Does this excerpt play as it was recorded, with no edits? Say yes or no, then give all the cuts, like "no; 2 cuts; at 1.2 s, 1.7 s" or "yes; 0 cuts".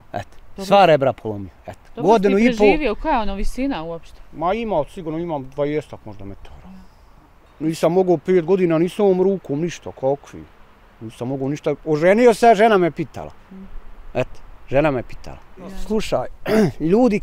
no; 2 cuts; at 7.5 s, 15.8 s